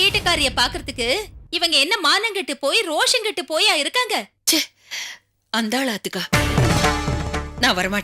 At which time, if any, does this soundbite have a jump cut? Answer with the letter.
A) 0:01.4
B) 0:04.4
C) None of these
B